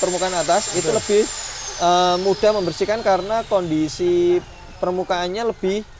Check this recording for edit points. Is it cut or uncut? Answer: uncut